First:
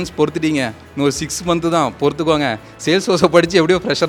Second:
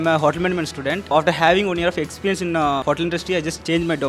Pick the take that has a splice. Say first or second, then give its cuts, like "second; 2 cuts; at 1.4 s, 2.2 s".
second; 2 cuts; at 1.1 s, 2.8 s